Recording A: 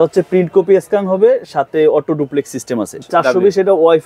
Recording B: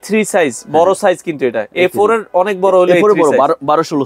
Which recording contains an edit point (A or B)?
A